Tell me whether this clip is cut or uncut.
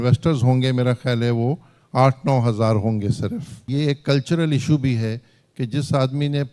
cut